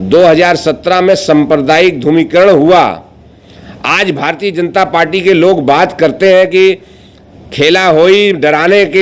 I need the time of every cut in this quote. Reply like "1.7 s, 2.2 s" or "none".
none